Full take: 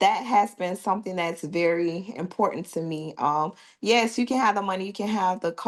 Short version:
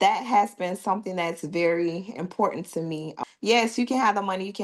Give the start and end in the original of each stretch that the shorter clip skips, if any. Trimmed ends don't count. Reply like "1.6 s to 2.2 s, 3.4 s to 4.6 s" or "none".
3.2 s to 3.6 s